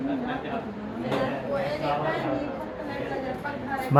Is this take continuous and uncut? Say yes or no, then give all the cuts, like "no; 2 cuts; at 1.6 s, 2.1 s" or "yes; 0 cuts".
yes; 0 cuts